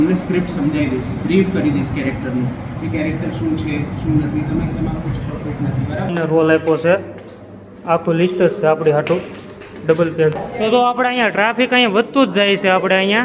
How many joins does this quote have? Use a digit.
2